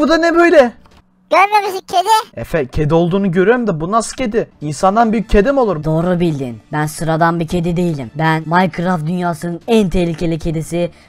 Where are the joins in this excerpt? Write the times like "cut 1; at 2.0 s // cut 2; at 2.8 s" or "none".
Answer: cut 1; at 0.9 s // cut 2; at 2.4 s // cut 3; at 4.6 s // cut 4; at 5.8 s // cut 5; at 6.6 s // cut 6; at 8.4 s